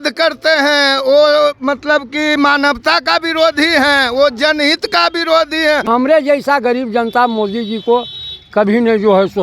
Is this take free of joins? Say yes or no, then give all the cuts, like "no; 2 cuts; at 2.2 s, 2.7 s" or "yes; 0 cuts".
no; 1 cut; at 5.9 s